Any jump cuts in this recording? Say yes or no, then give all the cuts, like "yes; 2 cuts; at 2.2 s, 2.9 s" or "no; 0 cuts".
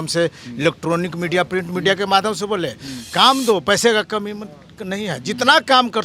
no; 0 cuts